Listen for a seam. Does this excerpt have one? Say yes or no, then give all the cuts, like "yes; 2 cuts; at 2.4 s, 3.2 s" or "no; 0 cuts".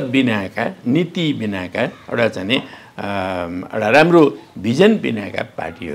no; 0 cuts